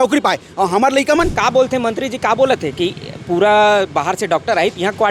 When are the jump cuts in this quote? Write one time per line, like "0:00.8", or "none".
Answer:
0:01.3